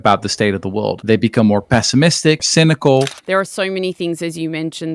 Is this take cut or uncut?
cut